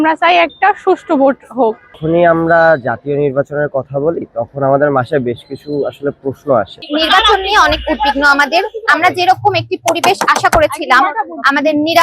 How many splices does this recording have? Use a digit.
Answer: 2